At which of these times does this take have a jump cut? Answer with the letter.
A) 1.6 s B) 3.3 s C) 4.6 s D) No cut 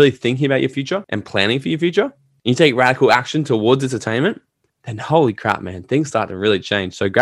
D